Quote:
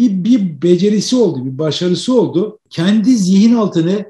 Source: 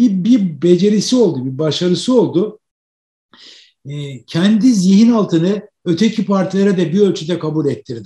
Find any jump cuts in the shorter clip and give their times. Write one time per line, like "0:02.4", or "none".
0:02.6